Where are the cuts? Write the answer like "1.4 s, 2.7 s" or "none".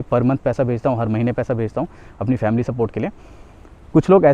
none